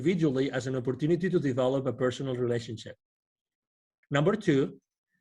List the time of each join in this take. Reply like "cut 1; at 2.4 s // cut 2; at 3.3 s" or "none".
cut 1; at 3.9 s